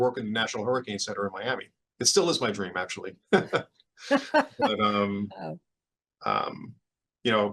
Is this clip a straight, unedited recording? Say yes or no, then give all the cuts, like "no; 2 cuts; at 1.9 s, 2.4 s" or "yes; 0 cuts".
no; 1 cut; at 1.8 s